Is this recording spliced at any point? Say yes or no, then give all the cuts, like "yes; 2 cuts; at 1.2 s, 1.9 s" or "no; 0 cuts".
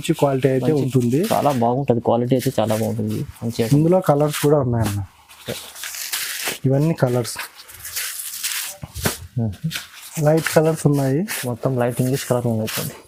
no; 0 cuts